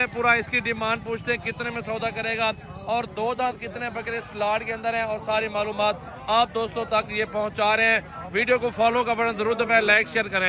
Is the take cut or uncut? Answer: uncut